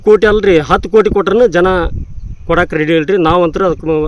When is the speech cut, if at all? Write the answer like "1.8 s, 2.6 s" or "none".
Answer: none